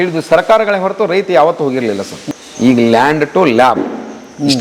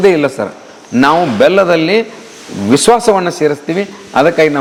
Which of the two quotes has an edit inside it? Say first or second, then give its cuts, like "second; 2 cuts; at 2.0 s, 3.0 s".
first; 1 cut; at 2.2 s